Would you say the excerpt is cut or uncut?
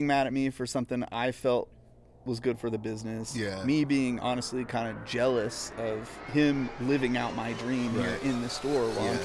uncut